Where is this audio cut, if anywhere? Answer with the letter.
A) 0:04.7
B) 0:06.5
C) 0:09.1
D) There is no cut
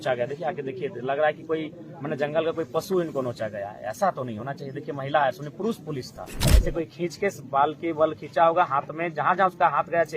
B